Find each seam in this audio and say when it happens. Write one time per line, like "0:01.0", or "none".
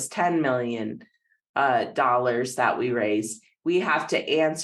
none